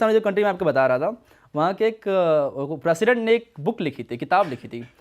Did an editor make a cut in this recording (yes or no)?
no